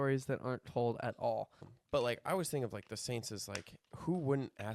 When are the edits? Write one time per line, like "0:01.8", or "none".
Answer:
0:01.7